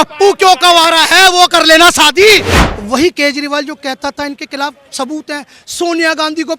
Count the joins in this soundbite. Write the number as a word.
one